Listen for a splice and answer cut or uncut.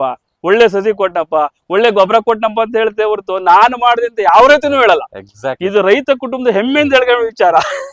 uncut